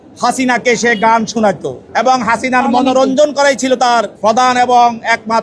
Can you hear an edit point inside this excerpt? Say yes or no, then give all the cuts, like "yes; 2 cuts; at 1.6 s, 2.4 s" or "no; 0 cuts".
yes; 2 cuts; at 1.7 s, 3.6 s